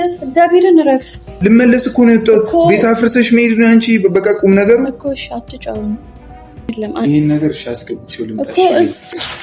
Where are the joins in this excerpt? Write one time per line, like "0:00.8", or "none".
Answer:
0:01.3
0:06.7